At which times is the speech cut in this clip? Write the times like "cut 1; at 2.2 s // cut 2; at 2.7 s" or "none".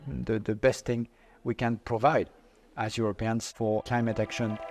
cut 1; at 3.7 s